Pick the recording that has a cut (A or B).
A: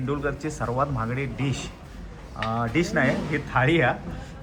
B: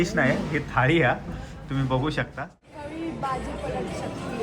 B